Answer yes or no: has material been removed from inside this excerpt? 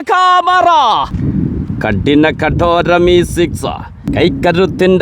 yes